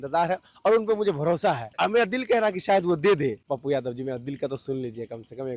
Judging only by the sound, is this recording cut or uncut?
cut